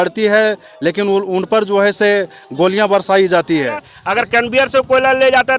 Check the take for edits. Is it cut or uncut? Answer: cut